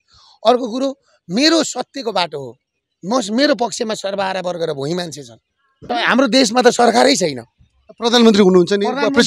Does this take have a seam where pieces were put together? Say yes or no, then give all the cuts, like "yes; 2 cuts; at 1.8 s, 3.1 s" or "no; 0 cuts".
yes; 1 cut; at 5.8 s